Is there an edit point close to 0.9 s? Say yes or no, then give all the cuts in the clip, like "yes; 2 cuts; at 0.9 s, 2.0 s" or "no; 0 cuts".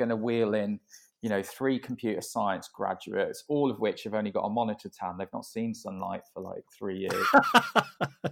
no; 0 cuts